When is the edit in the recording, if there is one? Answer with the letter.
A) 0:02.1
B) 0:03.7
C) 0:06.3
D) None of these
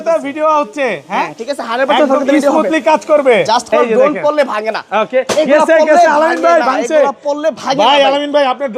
B